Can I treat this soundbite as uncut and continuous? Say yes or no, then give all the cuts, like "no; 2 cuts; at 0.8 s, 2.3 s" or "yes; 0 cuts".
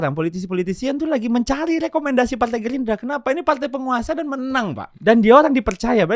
no; 1 cut; at 4.9 s